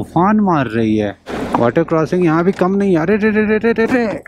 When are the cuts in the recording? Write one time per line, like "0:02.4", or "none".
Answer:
0:01.3